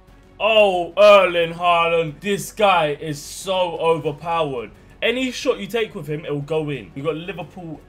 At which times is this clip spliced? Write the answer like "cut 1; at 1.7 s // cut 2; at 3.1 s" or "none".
cut 1; at 2.2 s // cut 2; at 6.9 s

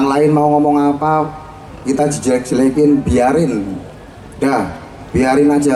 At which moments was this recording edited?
none

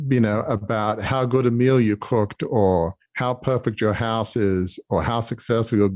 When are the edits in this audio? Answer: cut 1; at 1.0 s

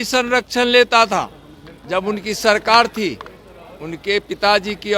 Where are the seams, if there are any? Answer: none

